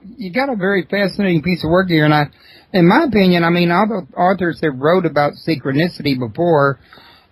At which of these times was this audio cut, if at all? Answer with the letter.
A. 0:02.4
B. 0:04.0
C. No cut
A